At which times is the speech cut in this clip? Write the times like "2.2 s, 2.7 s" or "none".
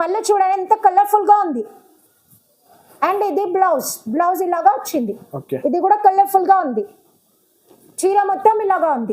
none